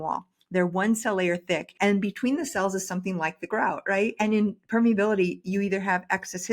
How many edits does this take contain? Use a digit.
2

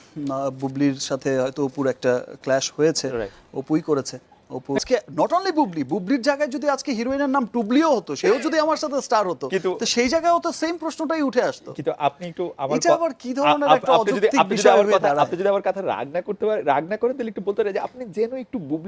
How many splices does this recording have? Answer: 1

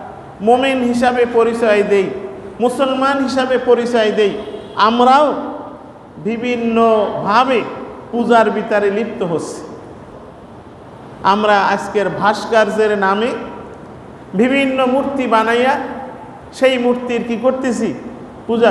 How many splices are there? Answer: 1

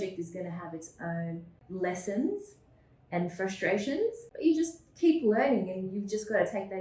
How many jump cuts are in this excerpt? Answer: 2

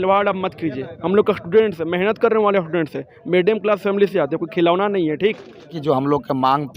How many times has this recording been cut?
1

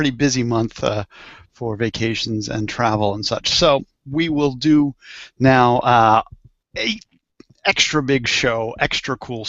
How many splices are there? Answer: 1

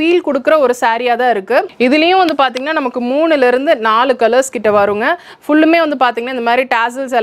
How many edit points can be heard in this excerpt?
1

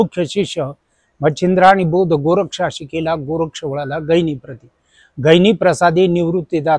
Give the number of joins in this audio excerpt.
0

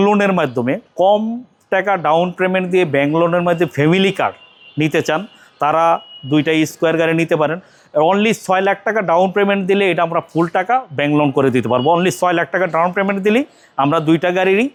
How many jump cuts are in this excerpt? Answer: 0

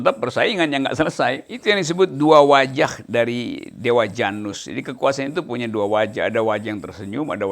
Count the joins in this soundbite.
1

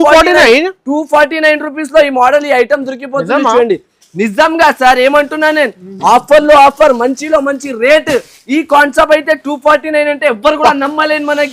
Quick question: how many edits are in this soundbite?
0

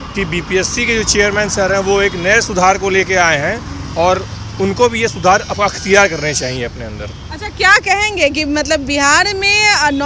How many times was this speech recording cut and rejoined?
0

